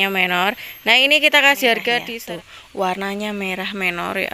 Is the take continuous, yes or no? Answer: no